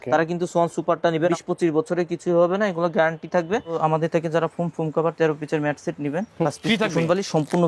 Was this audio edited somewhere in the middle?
yes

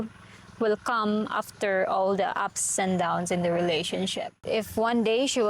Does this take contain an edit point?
yes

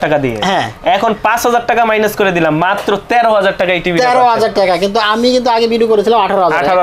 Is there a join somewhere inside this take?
no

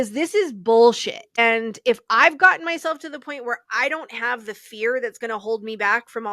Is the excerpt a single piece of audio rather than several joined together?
no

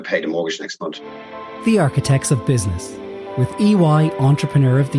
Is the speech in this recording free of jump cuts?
no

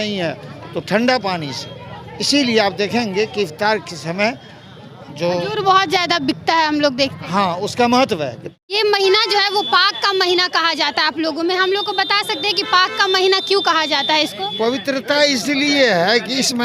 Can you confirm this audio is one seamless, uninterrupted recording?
no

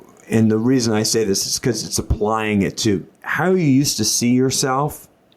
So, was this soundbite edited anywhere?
yes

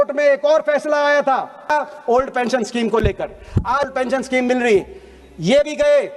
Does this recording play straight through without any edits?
no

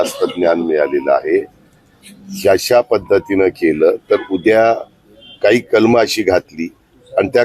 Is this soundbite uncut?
yes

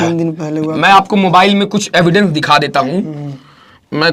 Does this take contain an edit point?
no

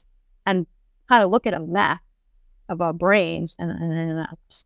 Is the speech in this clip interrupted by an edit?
no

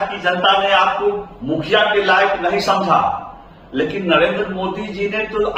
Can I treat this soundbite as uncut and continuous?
yes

